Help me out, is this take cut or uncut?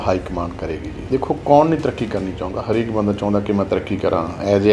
cut